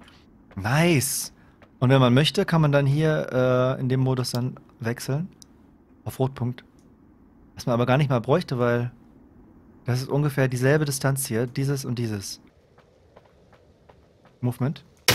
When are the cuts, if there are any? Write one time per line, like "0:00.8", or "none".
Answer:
0:12.5